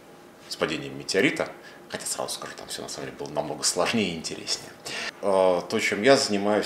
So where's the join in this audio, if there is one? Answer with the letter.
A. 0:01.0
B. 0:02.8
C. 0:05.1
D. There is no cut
C